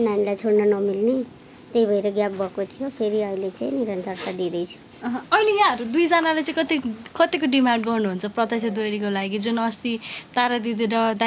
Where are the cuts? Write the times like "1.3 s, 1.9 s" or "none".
none